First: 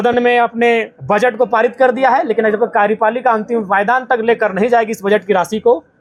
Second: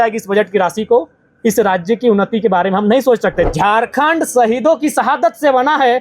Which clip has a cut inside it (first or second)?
second